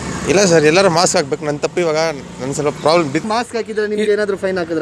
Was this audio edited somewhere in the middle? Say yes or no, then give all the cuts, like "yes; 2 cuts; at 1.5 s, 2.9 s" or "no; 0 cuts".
yes; 1 cut; at 3.2 s